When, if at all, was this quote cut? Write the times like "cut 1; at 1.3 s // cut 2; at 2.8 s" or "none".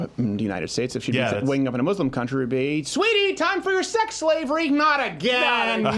none

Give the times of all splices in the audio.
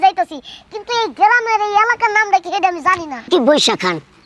cut 1; at 3.1 s

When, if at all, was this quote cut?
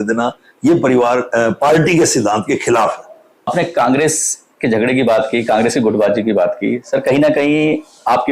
cut 1; at 3.5 s

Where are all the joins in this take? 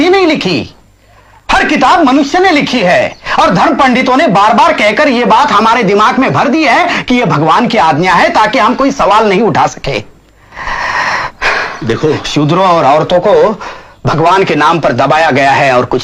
none

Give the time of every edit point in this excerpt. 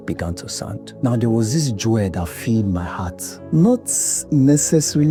none

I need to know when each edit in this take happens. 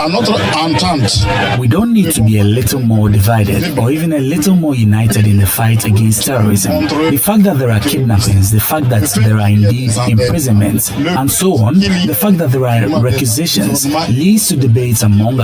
none

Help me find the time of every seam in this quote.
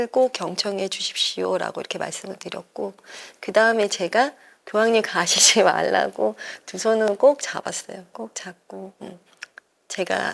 none

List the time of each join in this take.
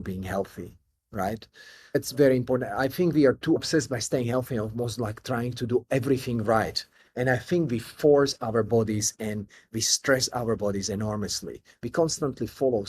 cut 1; at 3.6 s

